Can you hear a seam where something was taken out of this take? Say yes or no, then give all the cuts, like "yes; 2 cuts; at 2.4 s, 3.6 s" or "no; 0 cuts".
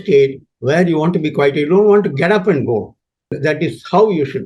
yes; 1 cut; at 3.3 s